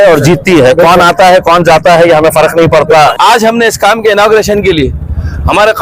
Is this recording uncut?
no; 1 cut; at 3.1 s

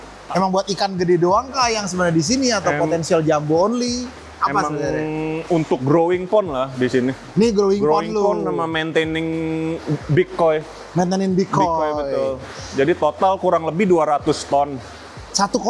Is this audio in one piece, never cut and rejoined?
yes; 0 cuts

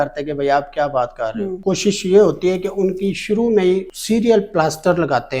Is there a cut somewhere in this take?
yes; 2 cuts; at 1.6 s, 3.9 s

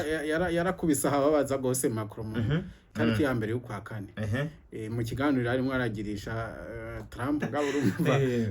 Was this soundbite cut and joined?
yes; 2 cuts; at 2.8 s, 7.4 s

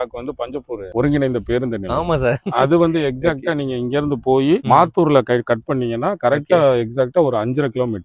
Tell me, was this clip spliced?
no; 0 cuts

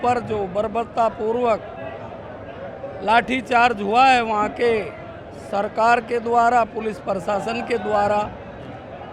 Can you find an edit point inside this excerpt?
no; 0 cuts

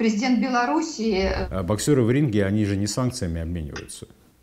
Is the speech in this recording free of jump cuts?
no; 1 cut; at 1.4 s

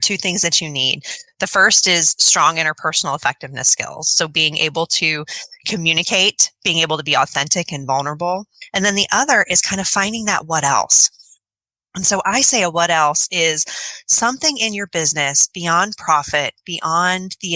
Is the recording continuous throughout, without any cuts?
no; 1 cut; at 8.6 s

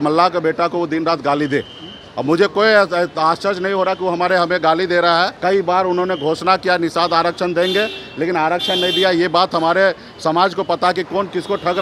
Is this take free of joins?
no; 1 cut; at 5.3 s

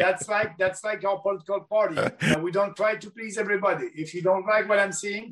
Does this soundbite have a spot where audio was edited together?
yes; 1 cut; at 2.3 s

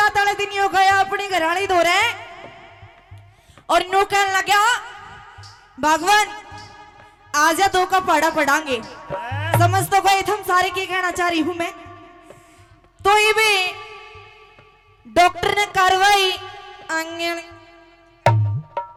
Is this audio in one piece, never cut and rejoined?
yes; 0 cuts

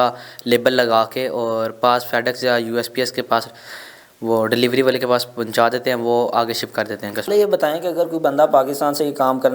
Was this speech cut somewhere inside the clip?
yes; 1 cut; at 7.3 s

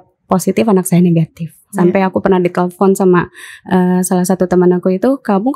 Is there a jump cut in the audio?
yes; 1 cut; at 1.8 s

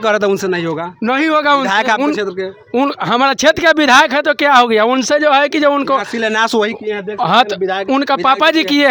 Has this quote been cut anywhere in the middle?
no; 0 cuts

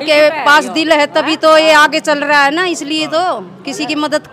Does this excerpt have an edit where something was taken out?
no; 0 cuts

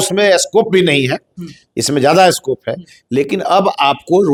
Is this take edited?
no; 0 cuts

